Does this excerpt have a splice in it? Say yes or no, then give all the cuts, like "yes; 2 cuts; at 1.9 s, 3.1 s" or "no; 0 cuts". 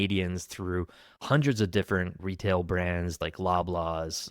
yes; 2 cuts; at 2.1 s, 3.2 s